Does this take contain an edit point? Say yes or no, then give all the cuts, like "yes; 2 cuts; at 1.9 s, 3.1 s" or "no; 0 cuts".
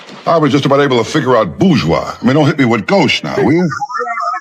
no; 0 cuts